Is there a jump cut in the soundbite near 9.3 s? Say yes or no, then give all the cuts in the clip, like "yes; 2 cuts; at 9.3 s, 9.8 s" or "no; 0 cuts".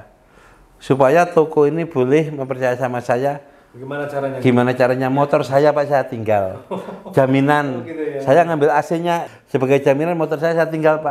yes; 1 cut; at 9.3 s